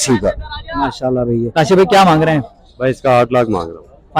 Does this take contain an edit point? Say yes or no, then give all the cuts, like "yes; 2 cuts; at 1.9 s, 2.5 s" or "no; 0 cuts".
yes; 1 cut; at 1.5 s